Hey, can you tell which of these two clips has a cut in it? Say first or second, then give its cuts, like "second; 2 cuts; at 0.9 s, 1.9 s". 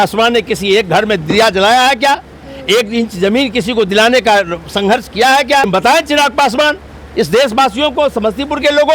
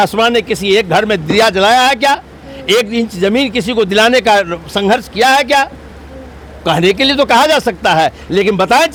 first; 1 cut; at 5.7 s